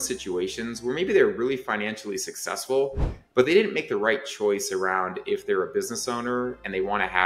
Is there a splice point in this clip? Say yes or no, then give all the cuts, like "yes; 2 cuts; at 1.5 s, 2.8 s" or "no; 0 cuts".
no; 0 cuts